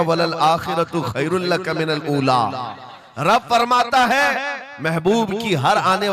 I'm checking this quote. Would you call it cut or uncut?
uncut